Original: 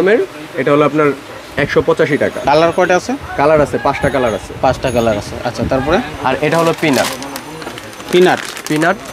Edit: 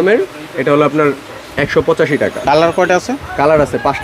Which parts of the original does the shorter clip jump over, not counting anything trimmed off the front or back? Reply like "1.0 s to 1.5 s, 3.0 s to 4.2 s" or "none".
none